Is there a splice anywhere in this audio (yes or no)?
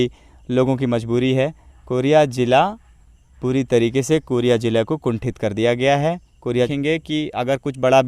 yes